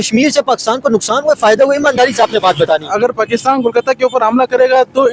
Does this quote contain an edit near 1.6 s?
no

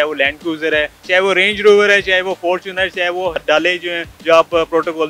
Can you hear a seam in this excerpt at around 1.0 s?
yes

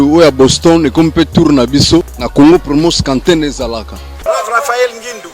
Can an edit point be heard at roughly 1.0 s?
no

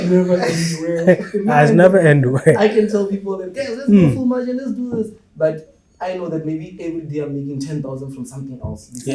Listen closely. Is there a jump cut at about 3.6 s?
no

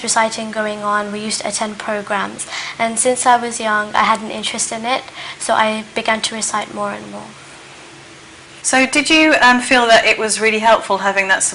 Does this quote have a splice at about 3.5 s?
yes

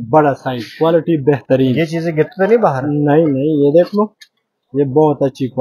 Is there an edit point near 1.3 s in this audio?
no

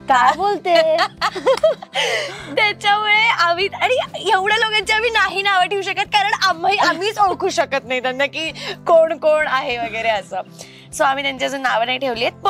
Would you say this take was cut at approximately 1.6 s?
no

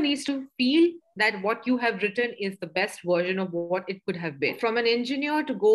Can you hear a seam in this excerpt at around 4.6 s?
yes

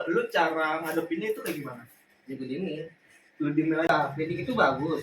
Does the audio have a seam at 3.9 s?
yes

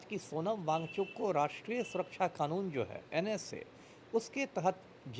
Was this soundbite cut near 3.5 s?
no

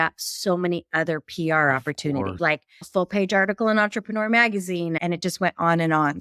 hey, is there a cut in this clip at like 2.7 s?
yes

